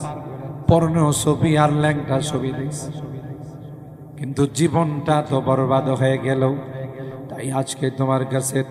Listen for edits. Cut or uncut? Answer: uncut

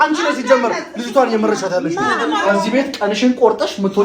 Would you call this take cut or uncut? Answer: cut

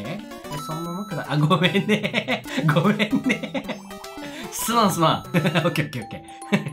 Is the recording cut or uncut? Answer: cut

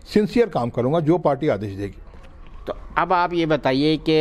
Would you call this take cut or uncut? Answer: uncut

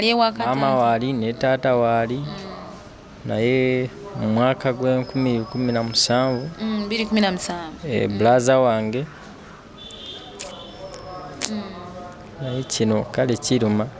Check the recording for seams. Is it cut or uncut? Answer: uncut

